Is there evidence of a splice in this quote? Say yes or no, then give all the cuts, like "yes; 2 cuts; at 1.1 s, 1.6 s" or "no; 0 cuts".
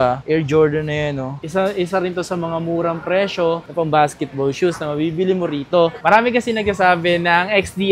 yes; 2 cuts; at 1.4 s, 6.0 s